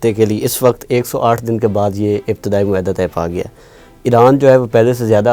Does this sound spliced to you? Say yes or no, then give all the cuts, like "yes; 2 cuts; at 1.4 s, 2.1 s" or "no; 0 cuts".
no; 0 cuts